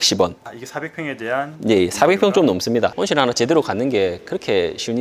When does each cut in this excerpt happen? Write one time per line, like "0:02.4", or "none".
0:03.0